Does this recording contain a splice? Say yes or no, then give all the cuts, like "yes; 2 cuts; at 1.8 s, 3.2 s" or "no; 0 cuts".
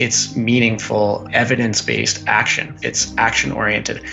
yes; 2 cuts; at 1.2 s, 2.6 s